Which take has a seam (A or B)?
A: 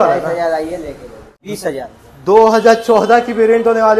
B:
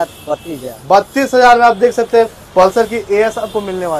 A